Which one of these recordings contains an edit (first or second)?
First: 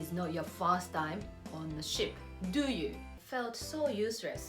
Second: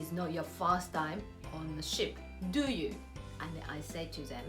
first